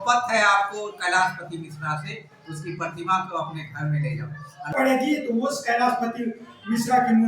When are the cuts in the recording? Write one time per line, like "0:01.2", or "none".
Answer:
0:04.7